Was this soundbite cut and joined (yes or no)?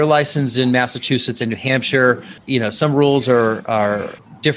no